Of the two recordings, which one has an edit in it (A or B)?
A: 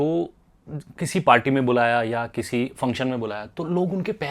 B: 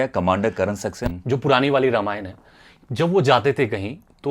B